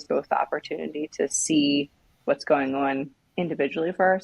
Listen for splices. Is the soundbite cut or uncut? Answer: cut